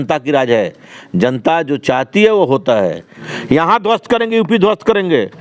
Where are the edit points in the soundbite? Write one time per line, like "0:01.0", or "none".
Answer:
0:03.1

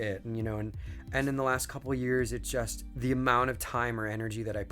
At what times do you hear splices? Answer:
0:00.9
0:02.8

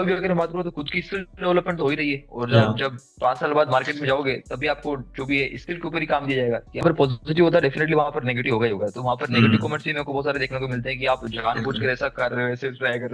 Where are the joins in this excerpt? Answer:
0:06.8

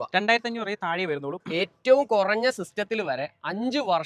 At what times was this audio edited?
0:01.4

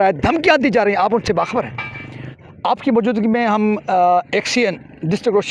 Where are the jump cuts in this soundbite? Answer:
0:02.6

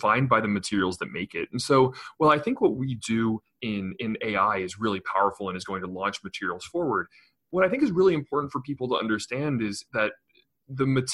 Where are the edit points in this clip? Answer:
0:09.8

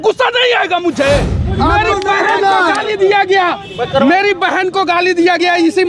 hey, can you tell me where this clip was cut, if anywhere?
0:01.5

